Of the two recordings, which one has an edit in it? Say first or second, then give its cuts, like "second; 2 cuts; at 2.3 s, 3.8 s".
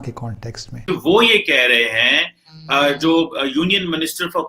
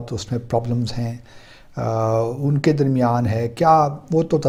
first; 1 cut; at 0.9 s